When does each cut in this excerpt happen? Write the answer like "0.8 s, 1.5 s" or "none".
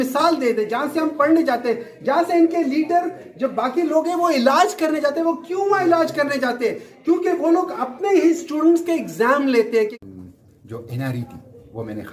9.9 s